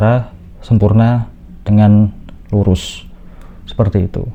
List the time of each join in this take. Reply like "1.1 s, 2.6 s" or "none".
none